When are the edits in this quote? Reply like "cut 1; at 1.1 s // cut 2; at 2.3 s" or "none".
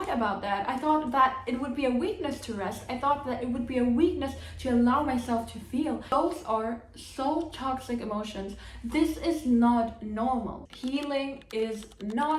none